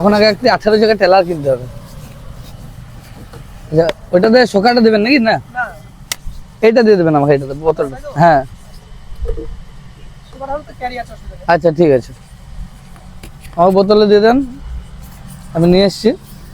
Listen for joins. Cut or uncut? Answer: uncut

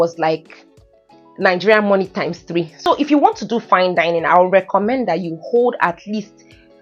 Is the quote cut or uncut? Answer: cut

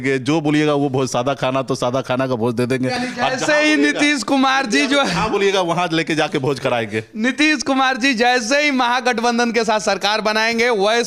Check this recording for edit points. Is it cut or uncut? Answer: uncut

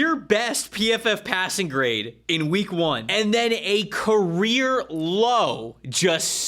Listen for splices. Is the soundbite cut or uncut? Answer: cut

